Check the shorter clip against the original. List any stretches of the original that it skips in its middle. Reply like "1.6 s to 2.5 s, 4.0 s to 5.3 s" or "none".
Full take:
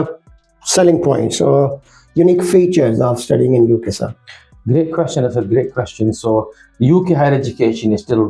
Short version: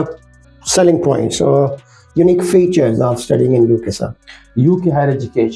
4.4 s to 6.6 s